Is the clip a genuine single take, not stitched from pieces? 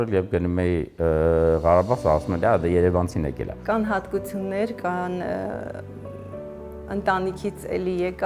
no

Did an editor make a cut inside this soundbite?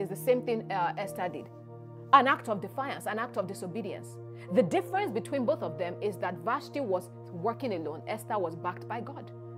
no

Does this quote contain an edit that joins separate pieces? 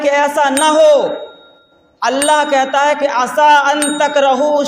no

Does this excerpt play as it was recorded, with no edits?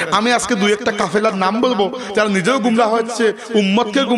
yes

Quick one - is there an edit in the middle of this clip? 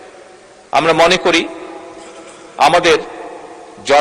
no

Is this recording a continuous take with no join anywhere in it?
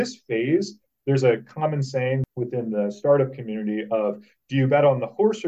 no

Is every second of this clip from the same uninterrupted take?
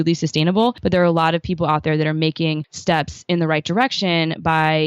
no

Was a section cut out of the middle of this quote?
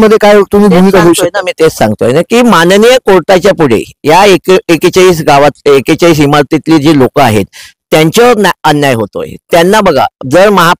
no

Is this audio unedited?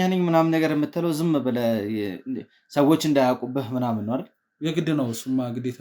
yes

